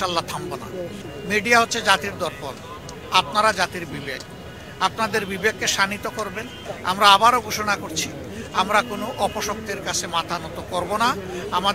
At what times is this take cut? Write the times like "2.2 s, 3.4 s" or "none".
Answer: 1.0 s, 6.6 s